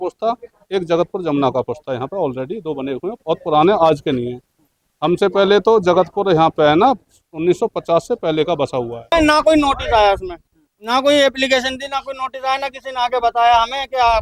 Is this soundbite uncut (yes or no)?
no